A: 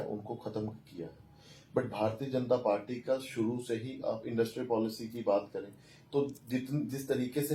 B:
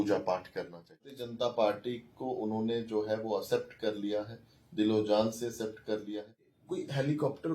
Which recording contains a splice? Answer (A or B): B